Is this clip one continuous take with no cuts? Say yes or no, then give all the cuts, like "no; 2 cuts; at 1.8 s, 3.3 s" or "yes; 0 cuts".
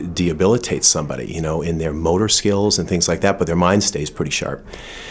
yes; 0 cuts